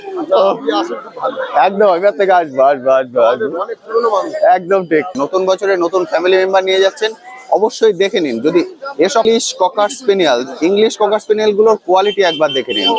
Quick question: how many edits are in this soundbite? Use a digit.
2